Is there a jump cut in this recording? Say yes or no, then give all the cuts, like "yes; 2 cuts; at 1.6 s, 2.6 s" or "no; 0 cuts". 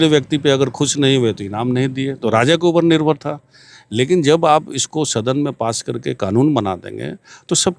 no; 0 cuts